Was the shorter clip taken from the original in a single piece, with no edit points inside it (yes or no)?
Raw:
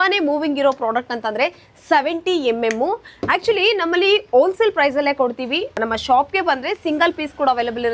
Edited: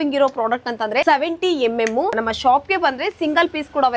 no